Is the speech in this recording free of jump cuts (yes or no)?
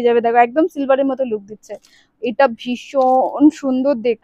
yes